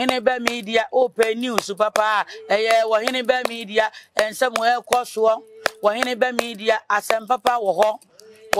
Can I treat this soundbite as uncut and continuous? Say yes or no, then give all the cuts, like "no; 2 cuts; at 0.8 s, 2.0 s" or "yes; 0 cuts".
yes; 0 cuts